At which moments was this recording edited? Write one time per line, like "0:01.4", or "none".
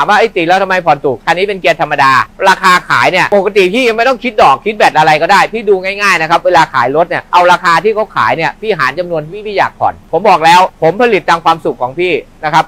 0:01.2
0:02.3
0:03.3
0:07.2
0:10.0